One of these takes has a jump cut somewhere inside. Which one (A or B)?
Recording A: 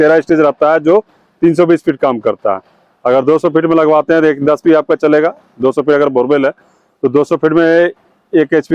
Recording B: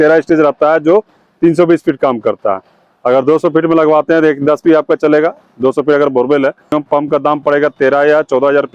B